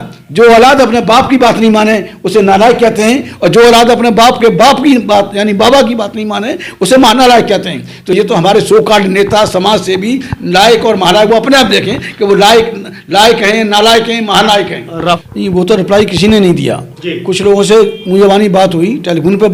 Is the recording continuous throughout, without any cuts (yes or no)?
yes